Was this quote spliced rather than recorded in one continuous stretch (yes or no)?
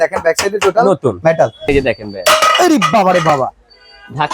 yes